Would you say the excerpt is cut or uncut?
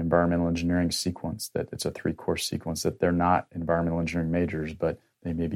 uncut